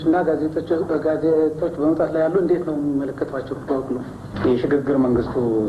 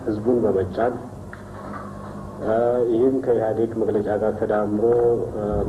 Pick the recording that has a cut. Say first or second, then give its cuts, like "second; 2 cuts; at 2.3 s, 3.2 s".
first; 1 cut; at 4.3 s